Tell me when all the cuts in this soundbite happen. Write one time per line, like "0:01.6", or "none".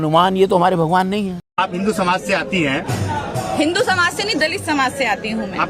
0:01.4